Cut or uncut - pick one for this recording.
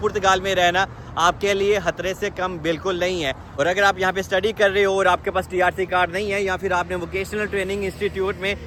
uncut